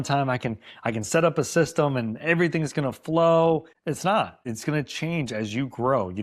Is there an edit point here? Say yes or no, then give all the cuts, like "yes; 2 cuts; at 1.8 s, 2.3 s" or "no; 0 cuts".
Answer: yes; 2 cuts; at 3.7 s, 4.4 s